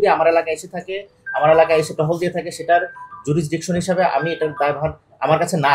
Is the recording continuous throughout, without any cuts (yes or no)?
yes